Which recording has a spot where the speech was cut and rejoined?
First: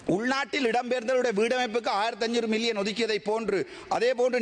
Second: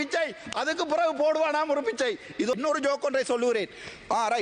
second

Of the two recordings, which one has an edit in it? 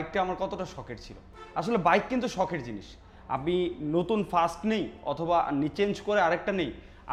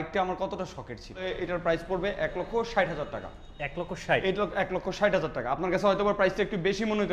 second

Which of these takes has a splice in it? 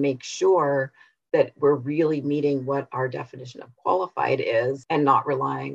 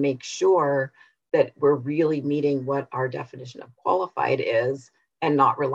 first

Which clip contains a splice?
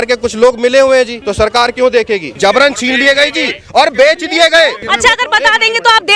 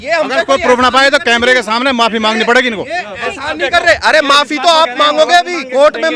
first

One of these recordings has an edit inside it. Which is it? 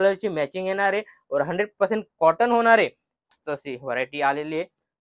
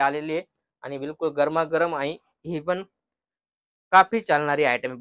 first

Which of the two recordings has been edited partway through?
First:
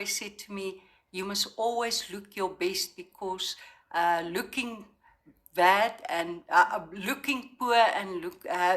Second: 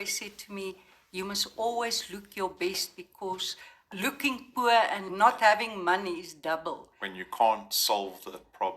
second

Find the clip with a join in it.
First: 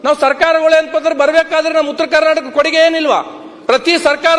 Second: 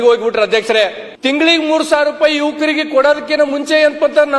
second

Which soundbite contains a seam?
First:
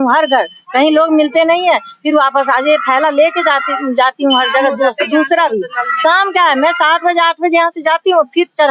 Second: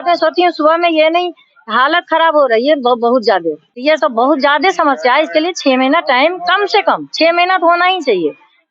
second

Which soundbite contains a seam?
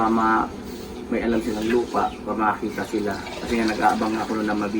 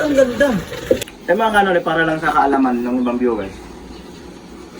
second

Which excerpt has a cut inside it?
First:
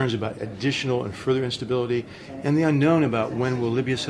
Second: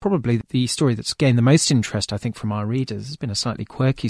second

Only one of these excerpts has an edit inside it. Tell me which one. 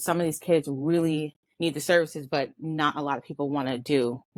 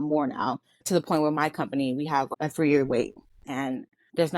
second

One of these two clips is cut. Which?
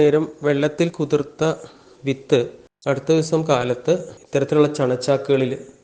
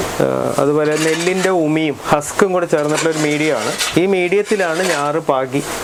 first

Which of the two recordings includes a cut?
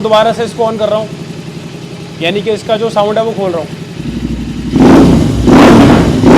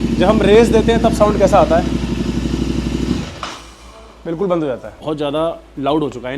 second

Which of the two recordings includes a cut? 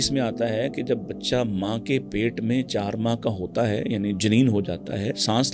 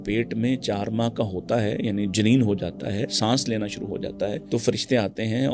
second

